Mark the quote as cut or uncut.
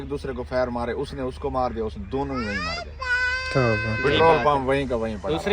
uncut